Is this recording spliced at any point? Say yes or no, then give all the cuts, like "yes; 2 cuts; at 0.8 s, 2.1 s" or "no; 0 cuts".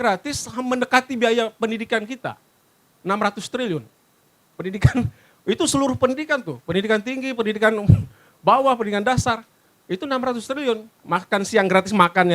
no; 0 cuts